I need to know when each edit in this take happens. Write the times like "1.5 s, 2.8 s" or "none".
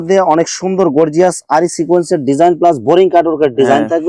none